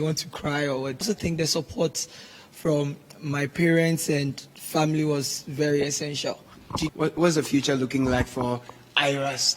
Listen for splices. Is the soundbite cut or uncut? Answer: cut